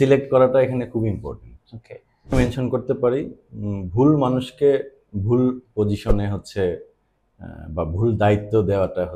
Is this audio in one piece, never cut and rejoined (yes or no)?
no